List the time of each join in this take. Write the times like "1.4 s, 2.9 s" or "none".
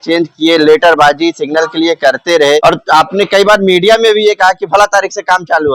2.6 s